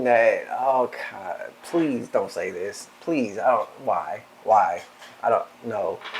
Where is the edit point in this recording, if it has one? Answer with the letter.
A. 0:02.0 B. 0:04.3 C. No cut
C